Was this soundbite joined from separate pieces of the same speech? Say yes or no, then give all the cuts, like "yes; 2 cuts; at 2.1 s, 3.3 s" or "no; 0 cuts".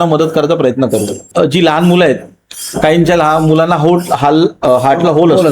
yes; 1 cut; at 1.2 s